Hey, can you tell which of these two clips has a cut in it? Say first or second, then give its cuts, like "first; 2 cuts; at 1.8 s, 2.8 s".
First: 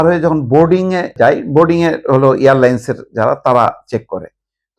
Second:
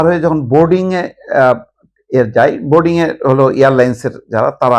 first; 1 cut; at 1.1 s